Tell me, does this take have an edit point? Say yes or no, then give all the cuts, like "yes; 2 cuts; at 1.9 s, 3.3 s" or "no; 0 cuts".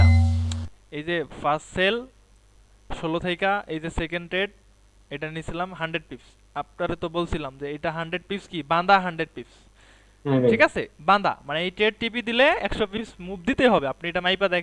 no; 0 cuts